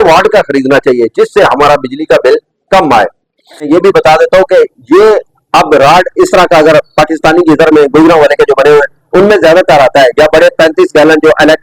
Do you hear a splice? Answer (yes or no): yes